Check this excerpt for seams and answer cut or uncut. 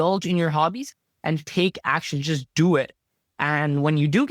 uncut